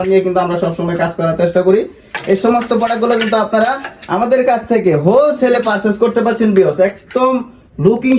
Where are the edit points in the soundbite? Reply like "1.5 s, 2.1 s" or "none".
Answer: none